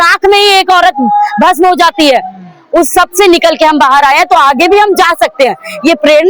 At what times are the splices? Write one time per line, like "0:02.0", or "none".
none